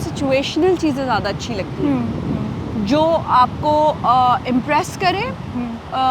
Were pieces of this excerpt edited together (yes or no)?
no